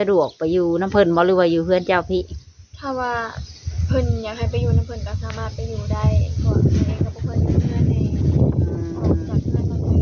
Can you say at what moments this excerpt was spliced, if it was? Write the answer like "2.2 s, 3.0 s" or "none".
none